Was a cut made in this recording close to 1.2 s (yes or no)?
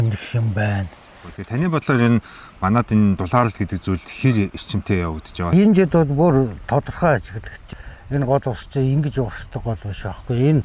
yes